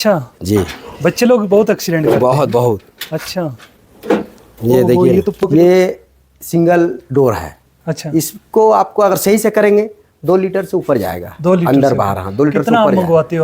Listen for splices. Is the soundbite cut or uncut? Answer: cut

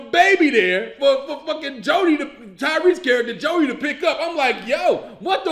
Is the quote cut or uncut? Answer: uncut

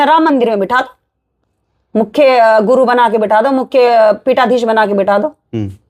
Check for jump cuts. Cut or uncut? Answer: uncut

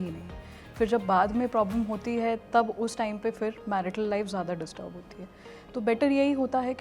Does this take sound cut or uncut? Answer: uncut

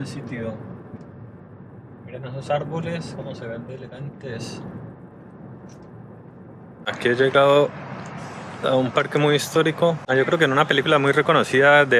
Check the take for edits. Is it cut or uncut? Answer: cut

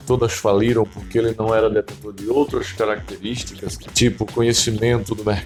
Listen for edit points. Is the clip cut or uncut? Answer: uncut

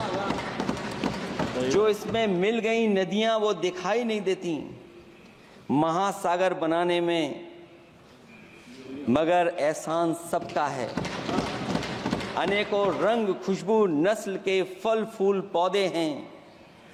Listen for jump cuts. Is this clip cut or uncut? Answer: uncut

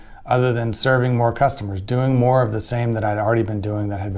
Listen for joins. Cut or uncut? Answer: uncut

